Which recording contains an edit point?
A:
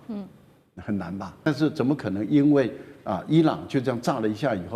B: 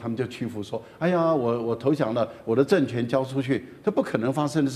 A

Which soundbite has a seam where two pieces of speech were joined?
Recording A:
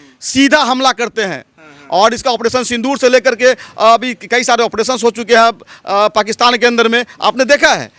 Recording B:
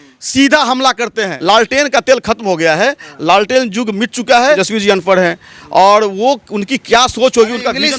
B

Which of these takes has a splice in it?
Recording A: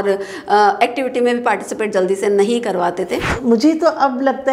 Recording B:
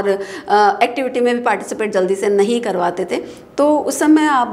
A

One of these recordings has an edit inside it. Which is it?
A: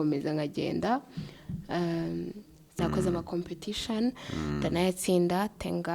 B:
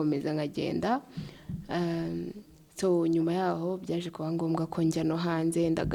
A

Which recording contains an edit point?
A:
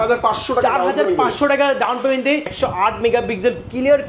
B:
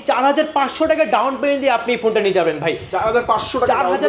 A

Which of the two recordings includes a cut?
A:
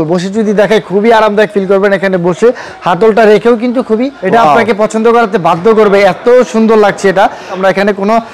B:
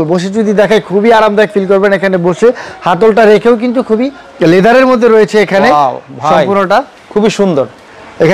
A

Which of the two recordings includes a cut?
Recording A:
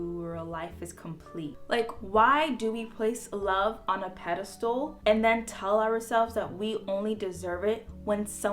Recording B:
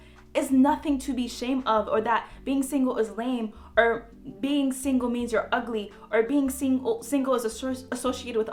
A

